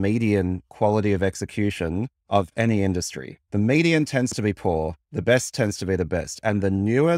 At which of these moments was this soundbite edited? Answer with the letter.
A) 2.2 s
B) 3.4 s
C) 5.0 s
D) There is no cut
B